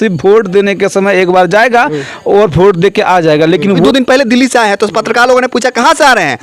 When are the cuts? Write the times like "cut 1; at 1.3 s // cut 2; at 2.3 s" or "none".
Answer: cut 1; at 3.8 s